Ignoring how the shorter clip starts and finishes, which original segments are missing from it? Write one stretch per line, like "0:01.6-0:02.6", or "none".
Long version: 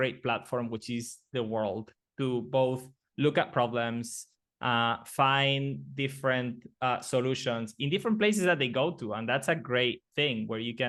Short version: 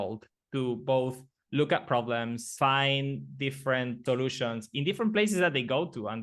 0:04.1-0:05.1
0:06.6-0:07.0